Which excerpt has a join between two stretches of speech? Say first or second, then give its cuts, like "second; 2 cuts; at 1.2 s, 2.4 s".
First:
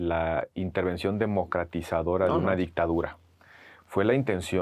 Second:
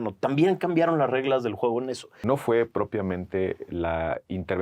second; 1 cut; at 2.2 s